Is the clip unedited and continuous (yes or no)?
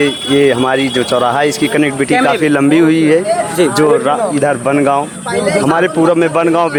yes